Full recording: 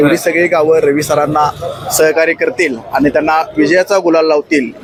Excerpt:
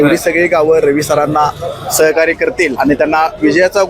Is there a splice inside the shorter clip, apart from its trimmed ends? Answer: yes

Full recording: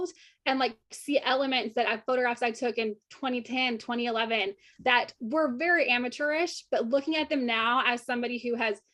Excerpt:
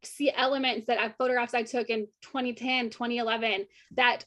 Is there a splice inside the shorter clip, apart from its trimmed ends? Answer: no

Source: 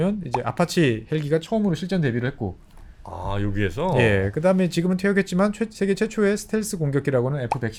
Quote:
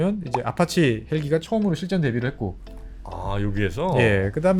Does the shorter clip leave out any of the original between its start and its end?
no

